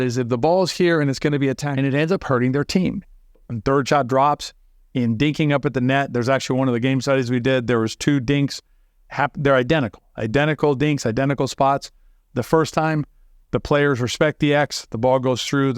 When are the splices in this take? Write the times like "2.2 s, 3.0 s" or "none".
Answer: 1.7 s